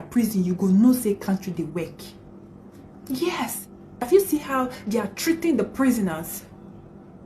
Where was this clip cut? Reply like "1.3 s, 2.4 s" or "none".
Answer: 4.1 s